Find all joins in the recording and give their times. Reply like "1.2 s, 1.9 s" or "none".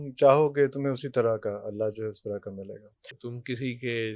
3.2 s